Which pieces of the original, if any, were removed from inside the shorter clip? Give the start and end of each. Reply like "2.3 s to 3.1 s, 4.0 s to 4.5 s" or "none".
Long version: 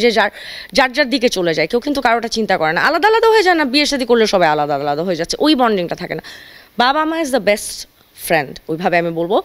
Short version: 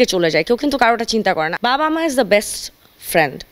2.7 s to 6.6 s